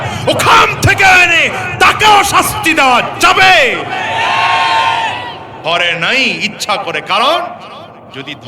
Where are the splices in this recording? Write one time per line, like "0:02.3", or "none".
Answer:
0:05.4